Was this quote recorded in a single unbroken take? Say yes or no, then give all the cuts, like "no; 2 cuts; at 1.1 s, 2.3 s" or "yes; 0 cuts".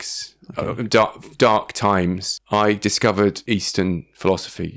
no; 2 cuts; at 2.3 s, 3.4 s